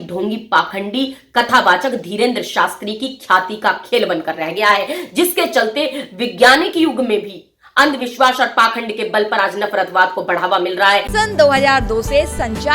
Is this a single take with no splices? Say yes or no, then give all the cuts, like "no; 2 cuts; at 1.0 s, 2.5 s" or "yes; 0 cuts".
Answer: no; 1 cut; at 11.1 s